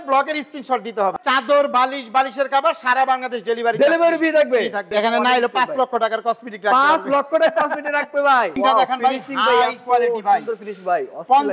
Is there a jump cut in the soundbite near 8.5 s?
yes; 3 cuts; at 1.1 s, 4.8 s, 8.5 s

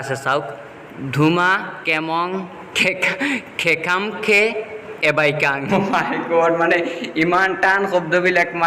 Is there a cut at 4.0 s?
no; 3 cuts; at 1.7 s, 2.6 s, 5.7 s

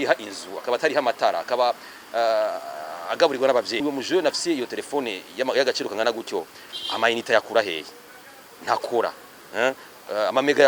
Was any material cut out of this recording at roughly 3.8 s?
yes; 1 cut; at 3.8 s

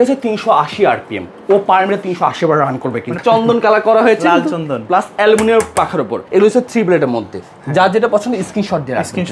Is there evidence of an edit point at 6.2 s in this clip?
yes; 2 cuts; at 3.2 s, 6.2 s

